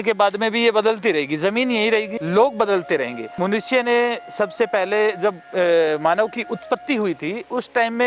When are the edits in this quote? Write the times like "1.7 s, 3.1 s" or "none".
2.2 s, 3.3 s